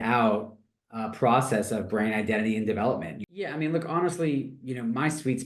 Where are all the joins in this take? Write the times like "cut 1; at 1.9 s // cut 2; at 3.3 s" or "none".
cut 1; at 3.1 s